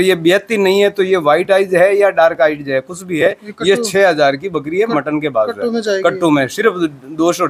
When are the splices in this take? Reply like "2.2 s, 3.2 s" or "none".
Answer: none